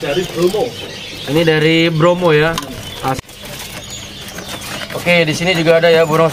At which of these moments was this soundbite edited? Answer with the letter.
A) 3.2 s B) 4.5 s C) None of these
A